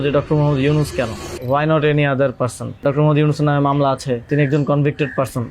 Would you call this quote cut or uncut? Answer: cut